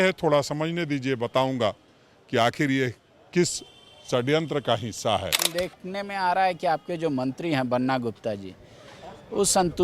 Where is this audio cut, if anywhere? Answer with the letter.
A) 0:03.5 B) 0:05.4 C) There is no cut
B